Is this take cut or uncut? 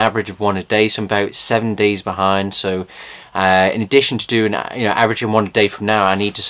cut